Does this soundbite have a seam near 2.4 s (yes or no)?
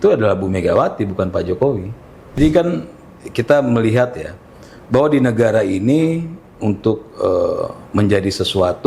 yes